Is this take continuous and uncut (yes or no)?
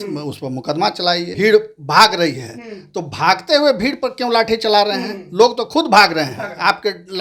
no